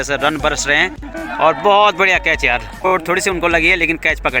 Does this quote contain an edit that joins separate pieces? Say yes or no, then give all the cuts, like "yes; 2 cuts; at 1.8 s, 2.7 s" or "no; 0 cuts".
yes; 2 cuts; at 1.1 s, 2.9 s